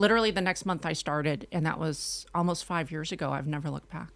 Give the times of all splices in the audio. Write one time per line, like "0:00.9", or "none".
none